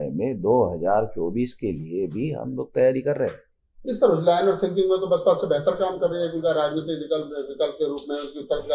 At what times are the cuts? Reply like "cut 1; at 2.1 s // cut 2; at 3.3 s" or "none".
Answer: none